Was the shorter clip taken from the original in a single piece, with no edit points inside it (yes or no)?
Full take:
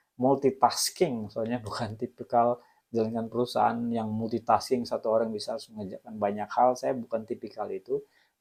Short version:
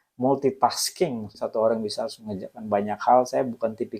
no